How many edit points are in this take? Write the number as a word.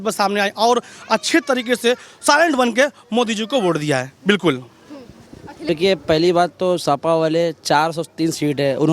one